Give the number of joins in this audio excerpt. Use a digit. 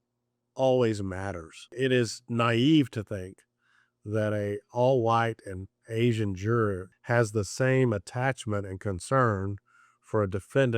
2